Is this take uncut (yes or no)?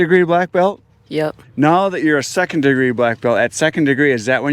no